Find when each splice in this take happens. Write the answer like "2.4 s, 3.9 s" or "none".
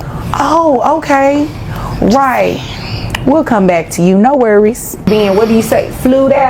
5.1 s